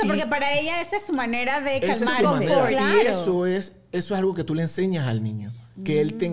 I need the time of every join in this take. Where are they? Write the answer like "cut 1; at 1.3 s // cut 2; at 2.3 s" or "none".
none